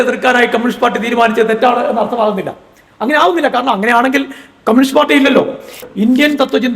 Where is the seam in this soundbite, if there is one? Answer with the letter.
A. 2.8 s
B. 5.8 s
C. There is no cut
B